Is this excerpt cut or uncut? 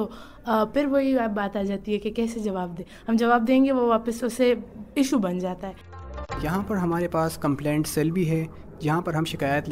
cut